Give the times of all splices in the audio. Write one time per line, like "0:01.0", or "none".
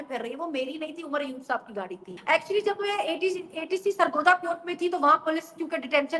0:02.1